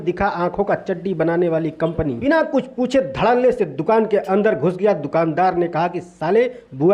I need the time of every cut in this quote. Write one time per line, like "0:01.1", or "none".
0:02.2